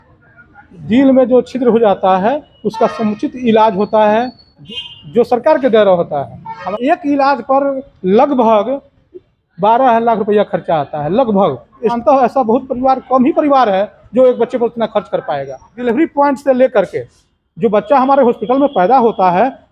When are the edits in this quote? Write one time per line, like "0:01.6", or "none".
0:04.7
0:06.7
0:12.0
0:15.7